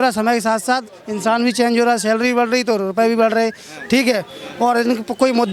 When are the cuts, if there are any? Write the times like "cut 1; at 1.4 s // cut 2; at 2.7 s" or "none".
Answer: none